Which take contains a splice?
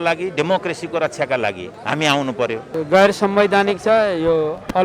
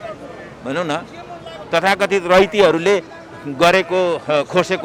first; 2 cuts; at 1.7 s, 2.8 s

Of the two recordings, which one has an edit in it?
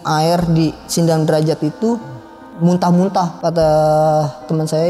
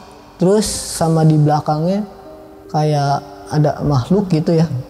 first; 1 cut; at 3.4 s

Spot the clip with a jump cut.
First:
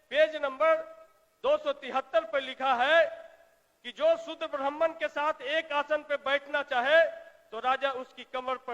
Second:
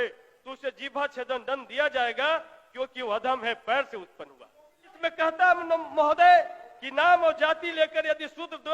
second; 1 cut; at 4.9 s

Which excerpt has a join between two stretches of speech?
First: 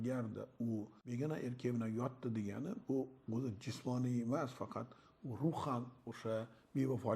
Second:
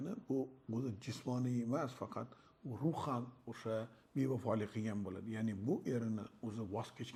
first; 1 cut; at 1.0 s

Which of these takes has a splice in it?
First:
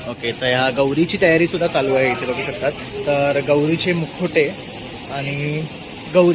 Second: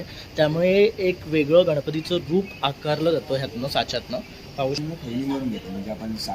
second; 1 cut; at 4.8 s

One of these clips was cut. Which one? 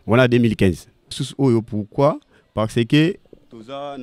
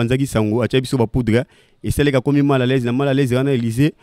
first; 1 cut; at 1.2 s

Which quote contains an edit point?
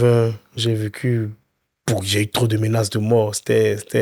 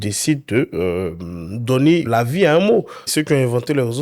second; 2 cuts; at 2.1 s, 3.1 s

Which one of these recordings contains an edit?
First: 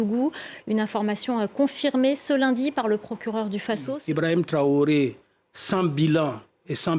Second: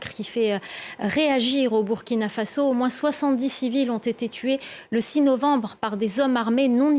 first; 1 cut; at 3.9 s

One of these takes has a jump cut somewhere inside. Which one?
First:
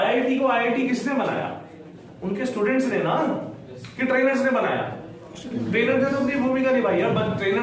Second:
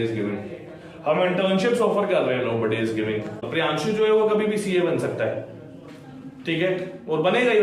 second; 1 cut; at 3.5 s

